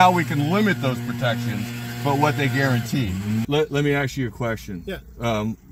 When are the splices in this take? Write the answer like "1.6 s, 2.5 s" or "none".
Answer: 3.4 s